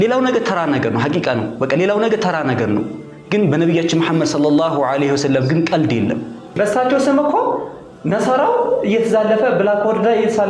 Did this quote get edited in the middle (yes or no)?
yes